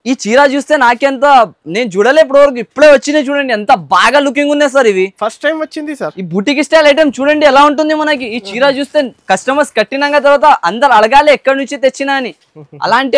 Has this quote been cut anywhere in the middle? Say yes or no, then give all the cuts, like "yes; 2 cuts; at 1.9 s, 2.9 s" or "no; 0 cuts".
no; 0 cuts